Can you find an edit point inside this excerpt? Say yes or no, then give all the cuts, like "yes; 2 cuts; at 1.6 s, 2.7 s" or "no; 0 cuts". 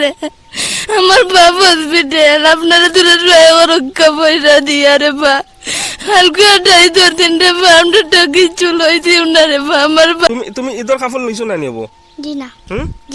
yes; 1 cut; at 10.3 s